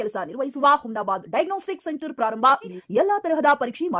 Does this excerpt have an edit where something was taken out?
yes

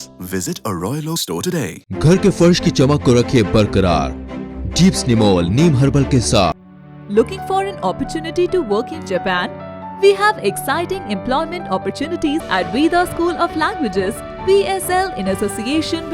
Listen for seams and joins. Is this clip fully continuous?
no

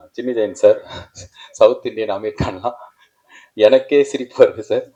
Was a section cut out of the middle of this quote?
no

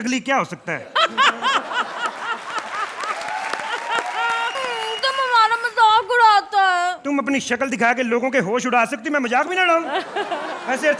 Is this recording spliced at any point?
no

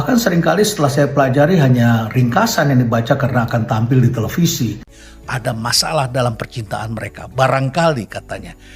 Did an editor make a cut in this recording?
yes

